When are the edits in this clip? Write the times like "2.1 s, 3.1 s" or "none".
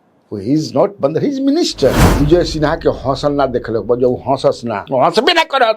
2.0 s